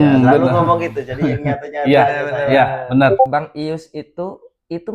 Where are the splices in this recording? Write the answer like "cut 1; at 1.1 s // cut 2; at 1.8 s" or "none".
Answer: cut 1; at 3.3 s